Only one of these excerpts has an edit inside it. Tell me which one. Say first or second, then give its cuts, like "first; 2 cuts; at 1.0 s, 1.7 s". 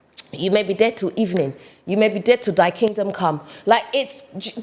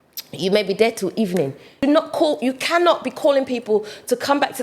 second; 1 cut; at 1.7 s